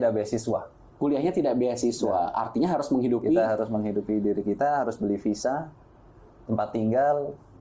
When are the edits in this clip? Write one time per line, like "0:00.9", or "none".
none